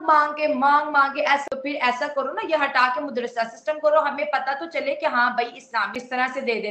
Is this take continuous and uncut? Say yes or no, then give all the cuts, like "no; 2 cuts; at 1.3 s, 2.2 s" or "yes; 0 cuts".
no; 2 cuts; at 1.4 s, 6.0 s